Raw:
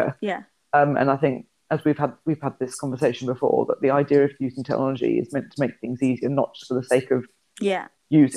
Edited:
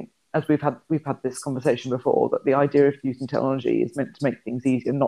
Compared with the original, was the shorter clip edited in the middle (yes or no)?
no